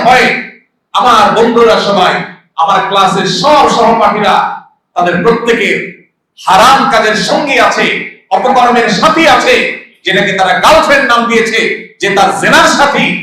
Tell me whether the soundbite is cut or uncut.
uncut